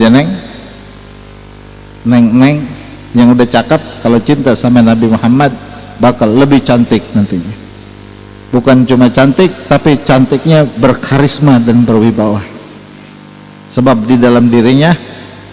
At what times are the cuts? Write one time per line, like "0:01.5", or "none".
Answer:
none